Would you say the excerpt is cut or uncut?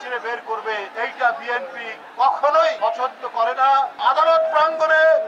cut